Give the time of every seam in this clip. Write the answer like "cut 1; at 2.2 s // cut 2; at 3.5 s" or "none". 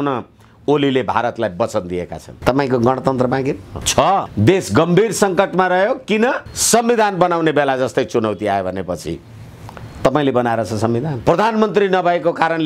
cut 1; at 4.3 s // cut 2; at 11.1 s

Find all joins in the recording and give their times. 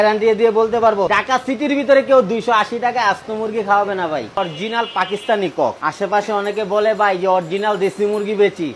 cut 1; at 1.1 s // cut 2; at 4.4 s

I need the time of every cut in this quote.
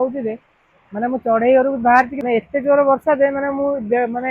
cut 1; at 2.2 s

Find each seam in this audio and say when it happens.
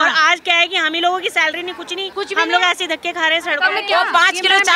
cut 1; at 2.0 s // cut 2; at 3.8 s

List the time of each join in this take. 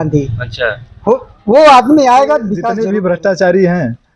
cut 1; at 2.6 s

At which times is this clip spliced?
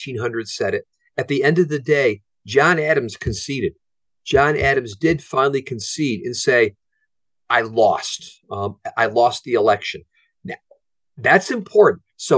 none

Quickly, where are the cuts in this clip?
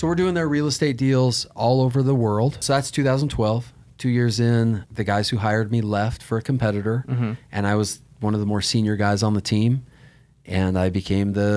cut 1; at 2.6 s // cut 2; at 4.9 s

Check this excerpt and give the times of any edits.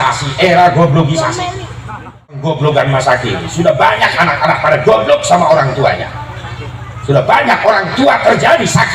cut 1; at 2.4 s

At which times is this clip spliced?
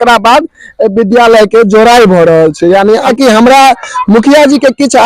cut 1; at 3.1 s

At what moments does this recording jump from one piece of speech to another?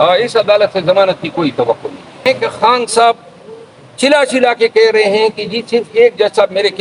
cut 1; at 2.3 s

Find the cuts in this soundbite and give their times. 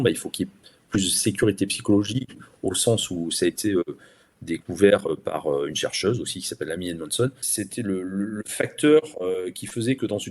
cut 1; at 7.4 s

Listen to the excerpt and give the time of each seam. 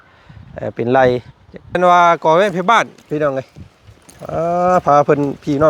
cut 1; at 1.8 s

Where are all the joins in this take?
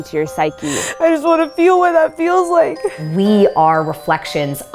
cut 1; at 0.8 s // cut 2; at 3.0 s

